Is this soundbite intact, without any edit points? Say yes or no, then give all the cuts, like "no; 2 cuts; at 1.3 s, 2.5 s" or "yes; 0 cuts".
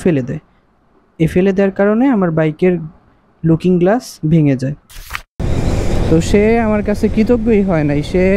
no; 1 cut; at 4.9 s